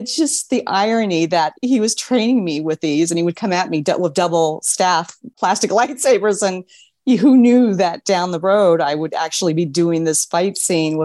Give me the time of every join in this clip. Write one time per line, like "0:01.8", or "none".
none